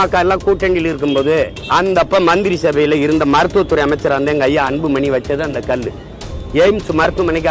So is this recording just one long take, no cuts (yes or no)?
no